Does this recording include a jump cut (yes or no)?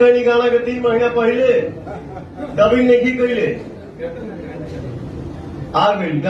no